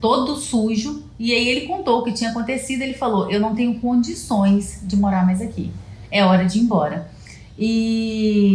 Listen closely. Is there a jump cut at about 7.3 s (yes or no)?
no